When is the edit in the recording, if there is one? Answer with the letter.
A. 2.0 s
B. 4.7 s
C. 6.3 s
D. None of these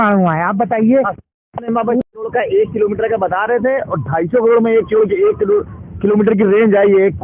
A